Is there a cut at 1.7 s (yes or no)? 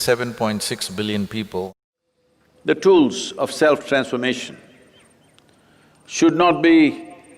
yes